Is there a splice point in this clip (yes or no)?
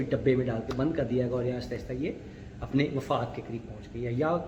no